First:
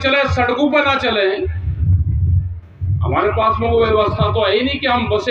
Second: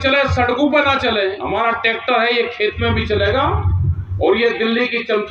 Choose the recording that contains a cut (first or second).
second